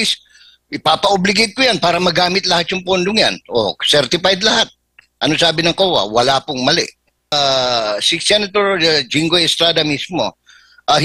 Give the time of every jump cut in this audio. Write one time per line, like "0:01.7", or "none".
0:07.3